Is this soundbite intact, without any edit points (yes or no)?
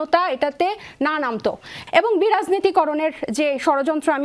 no